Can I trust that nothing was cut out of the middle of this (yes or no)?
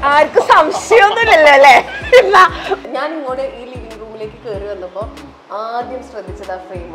no